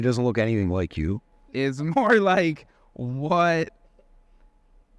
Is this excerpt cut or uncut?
cut